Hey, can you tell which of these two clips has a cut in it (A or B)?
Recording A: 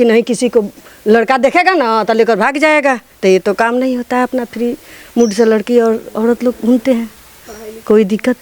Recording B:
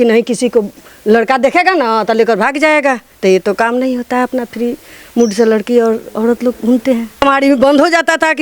B